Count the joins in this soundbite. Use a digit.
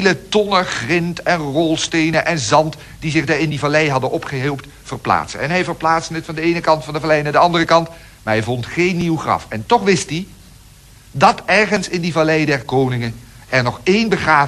1